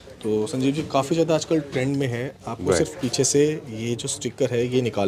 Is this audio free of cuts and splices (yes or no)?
yes